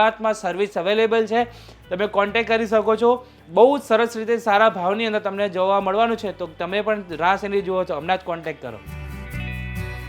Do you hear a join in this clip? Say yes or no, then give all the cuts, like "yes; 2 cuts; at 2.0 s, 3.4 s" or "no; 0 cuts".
yes; 2 cuts; at 3.4 s, 8.8 s